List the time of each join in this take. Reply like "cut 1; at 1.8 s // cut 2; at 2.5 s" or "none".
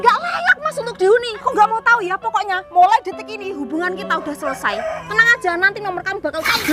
cut 1; at 1.3 s